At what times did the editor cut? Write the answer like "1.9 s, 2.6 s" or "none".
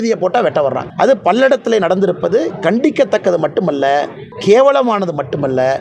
0.8 s, 4.2 s